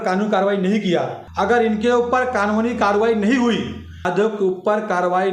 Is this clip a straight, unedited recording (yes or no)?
no